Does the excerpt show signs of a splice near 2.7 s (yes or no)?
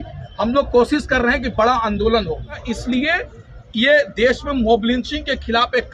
yes